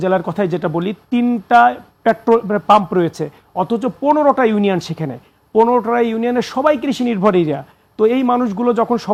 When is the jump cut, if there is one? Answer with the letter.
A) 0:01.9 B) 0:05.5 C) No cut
C